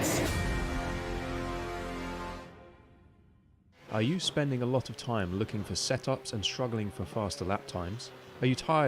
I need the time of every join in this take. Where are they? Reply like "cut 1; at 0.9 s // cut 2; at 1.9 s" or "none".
cut 1; at 3.8 s